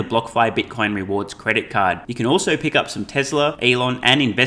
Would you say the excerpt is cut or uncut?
cut